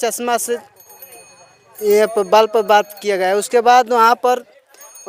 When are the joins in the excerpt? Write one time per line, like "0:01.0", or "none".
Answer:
none